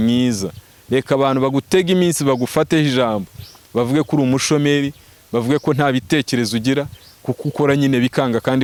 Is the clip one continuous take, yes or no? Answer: yes